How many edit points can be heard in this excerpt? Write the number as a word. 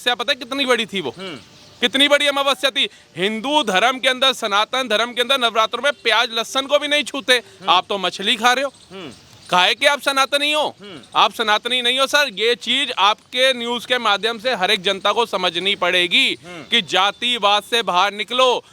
zero